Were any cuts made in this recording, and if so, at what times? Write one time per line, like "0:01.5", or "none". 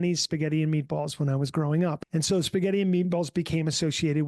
0:02.0